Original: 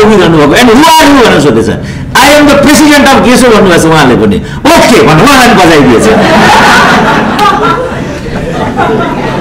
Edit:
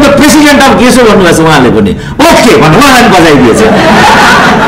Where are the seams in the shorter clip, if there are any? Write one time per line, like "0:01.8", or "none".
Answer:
none